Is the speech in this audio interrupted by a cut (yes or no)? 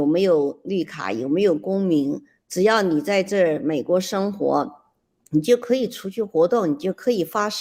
no